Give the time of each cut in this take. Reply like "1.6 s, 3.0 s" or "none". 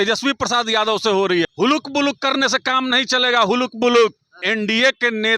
1.5 s, 4.4 s